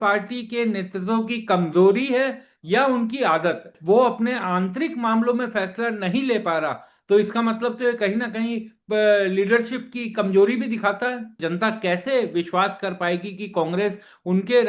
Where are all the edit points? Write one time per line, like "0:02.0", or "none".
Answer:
0:03.7
0:11.4